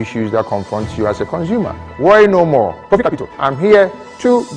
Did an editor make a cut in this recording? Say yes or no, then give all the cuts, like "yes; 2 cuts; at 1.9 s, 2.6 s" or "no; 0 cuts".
yes; 1 cut; at 2.9 s